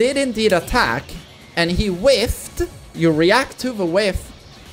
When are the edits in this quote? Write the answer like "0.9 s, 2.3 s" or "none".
2.8 s